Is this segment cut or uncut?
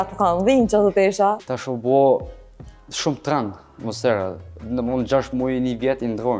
cut